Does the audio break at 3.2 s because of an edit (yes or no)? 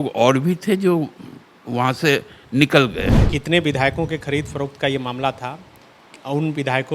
yes